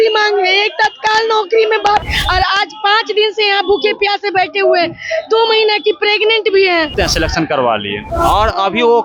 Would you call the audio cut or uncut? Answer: cut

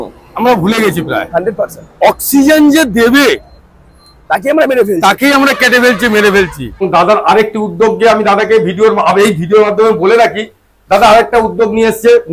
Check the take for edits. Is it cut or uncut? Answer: cut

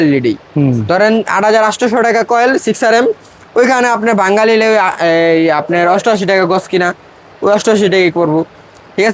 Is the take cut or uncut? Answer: uncut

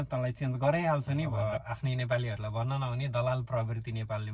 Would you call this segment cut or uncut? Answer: cut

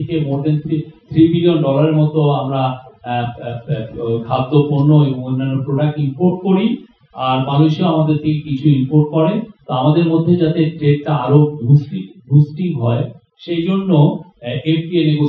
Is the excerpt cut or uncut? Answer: uncut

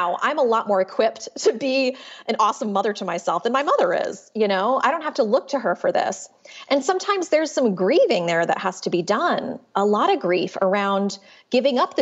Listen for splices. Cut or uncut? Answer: uncut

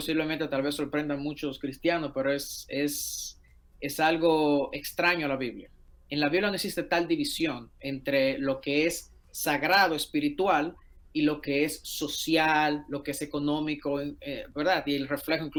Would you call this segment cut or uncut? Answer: uncut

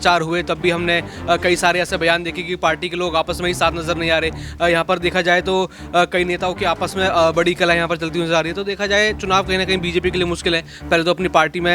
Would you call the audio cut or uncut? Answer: uncut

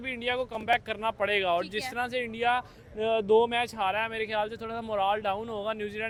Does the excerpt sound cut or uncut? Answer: uncut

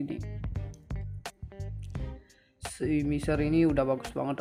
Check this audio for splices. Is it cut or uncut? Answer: uncut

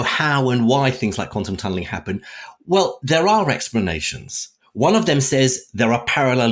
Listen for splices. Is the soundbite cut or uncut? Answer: uncut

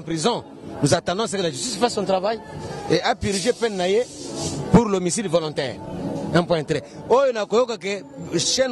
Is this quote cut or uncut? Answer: uncut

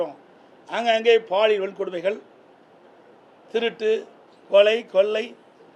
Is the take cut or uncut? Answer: uncut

